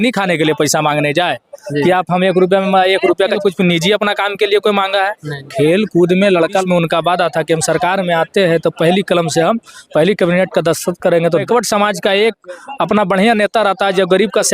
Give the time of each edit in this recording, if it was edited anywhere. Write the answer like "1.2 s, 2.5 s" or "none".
3.4 s, 6.6 s, 11.4 s